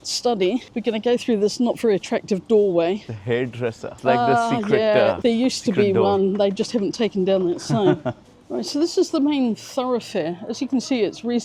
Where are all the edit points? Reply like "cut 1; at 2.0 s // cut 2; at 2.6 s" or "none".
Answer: none